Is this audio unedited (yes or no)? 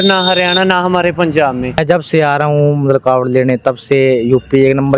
no